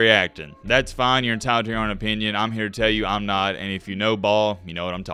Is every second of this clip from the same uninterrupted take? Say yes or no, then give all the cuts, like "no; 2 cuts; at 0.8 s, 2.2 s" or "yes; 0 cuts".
yes; 0 cuts